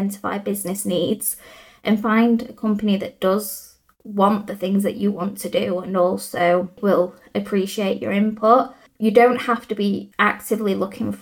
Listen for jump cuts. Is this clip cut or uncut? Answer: cut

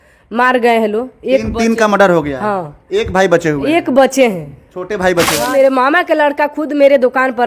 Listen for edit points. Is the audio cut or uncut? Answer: cut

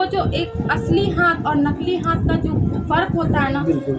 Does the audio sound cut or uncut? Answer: uncut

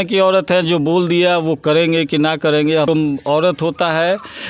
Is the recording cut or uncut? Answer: cut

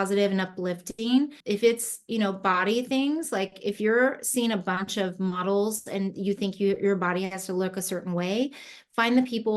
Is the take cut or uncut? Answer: cut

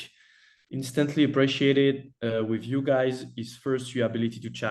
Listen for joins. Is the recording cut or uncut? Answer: uncut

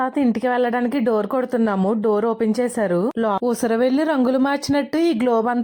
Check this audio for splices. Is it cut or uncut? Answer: cut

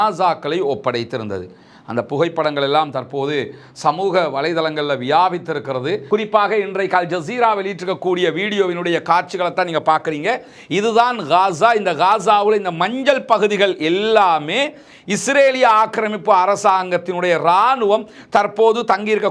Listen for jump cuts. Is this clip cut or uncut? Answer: cut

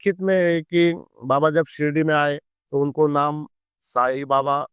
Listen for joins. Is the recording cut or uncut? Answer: uncut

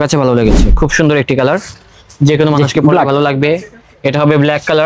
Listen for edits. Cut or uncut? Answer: uncut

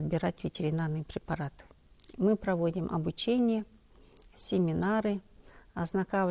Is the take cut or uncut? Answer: uncut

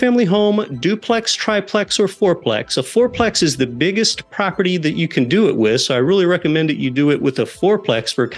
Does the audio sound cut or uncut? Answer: uncut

